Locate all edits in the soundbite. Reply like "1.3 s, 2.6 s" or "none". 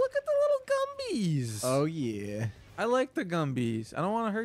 none